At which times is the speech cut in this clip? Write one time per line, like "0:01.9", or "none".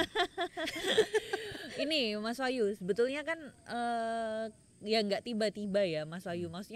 none